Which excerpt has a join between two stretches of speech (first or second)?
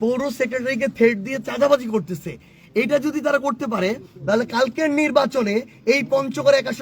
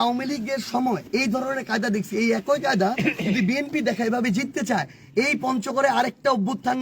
second